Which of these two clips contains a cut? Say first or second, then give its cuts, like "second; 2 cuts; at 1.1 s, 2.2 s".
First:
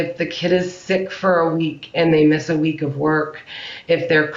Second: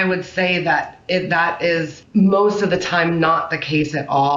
second; 1 cut; at 2.0 s